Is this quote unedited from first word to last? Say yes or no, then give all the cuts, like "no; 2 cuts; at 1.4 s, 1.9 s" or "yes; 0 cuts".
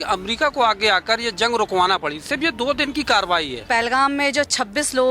no; 1 cut; at 3.5 s